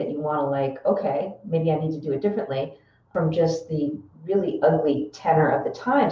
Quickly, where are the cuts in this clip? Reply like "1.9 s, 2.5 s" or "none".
3.1 s, 4.1 s